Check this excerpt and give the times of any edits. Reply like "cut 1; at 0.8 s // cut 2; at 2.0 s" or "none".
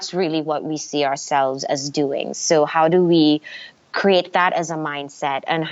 none